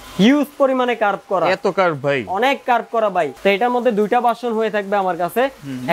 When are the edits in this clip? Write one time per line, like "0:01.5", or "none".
0:03.3